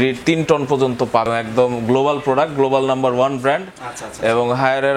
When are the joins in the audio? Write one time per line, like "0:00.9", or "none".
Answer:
0:01.3